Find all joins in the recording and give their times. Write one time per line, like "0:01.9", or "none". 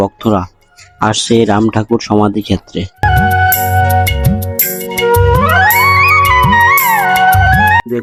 none